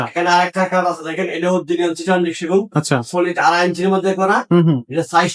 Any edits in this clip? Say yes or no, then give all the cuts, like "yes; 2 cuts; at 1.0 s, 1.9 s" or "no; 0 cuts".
no; 0 cuts